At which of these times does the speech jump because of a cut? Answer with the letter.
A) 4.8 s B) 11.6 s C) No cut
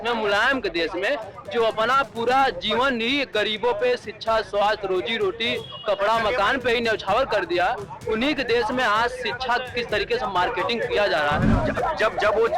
B